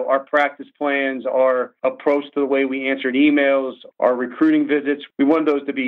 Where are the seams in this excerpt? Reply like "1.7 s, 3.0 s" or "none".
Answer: 1.7 s, 3.8 s, 5.0 s